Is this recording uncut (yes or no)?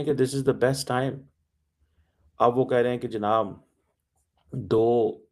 yes